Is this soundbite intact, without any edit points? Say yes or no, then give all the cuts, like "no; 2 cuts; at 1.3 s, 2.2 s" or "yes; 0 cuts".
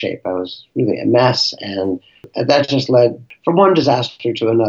no; 2 cuts; at 2.3 s, 3.3 s